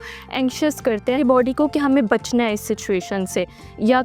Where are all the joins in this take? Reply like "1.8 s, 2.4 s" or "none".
1.2 s